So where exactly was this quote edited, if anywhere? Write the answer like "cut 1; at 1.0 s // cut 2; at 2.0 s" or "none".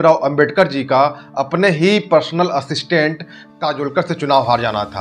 none